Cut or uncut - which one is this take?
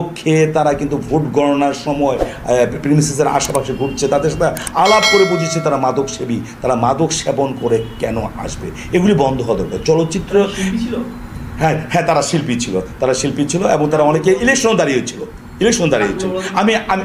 uncut